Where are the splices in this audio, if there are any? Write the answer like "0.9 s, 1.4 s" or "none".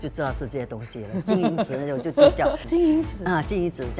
2.6 s